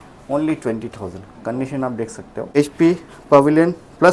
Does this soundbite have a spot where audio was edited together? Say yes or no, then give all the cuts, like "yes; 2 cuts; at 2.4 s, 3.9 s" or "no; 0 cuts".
yes; 1 cut; at 2.6 s